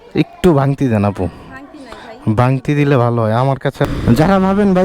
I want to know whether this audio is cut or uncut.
cut